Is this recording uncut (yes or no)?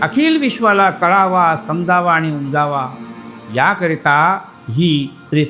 yes